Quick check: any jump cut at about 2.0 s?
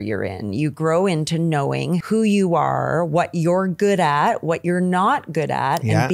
yes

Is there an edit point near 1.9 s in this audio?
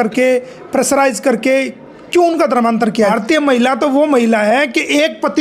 no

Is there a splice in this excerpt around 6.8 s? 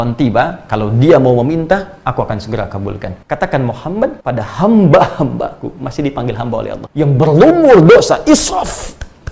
yes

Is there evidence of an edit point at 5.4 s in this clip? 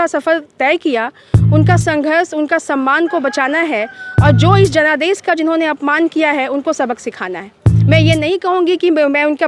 no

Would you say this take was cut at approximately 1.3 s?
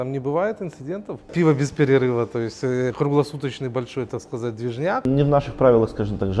yes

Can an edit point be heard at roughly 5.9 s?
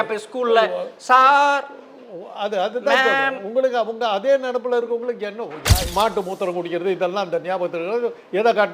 yes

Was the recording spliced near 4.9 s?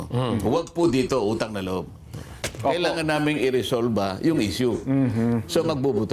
no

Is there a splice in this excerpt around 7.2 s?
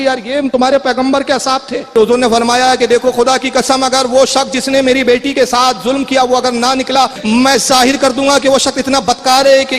yes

